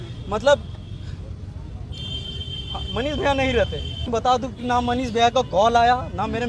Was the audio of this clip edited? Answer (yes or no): yes